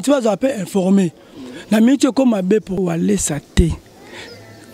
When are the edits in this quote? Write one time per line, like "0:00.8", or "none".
0:02.8